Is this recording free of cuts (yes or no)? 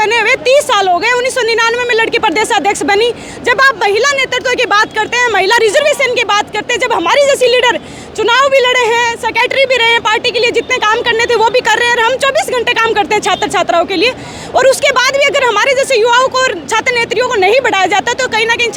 yes